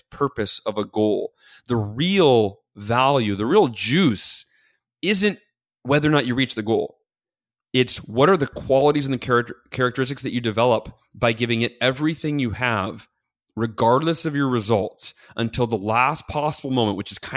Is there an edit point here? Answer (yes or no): no